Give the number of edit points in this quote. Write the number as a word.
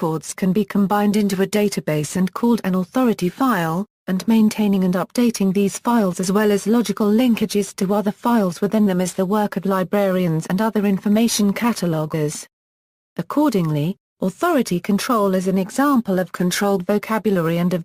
one